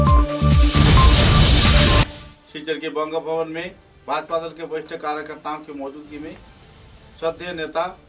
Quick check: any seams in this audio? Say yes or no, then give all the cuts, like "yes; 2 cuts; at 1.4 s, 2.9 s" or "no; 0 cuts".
yes; 1 cut; at 2.2 s